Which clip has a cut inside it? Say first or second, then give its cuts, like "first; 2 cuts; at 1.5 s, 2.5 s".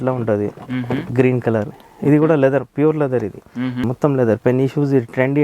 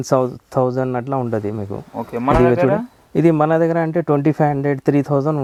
first; 2 cuts; at 1.1 s, 3.8 s